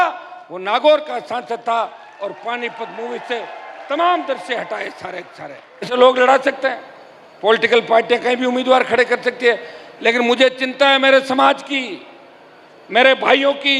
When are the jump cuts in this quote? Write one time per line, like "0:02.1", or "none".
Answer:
0:05.9